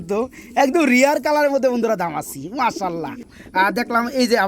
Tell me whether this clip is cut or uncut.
cut